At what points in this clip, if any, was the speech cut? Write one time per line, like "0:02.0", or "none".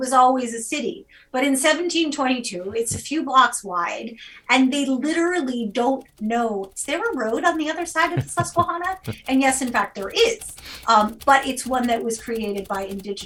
none